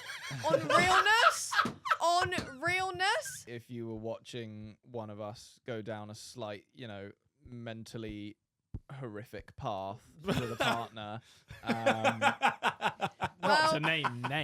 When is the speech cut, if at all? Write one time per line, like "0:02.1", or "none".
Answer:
0:03.5